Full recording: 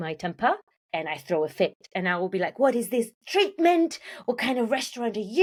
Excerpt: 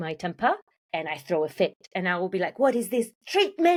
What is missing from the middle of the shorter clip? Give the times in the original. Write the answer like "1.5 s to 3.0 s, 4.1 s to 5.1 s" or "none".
none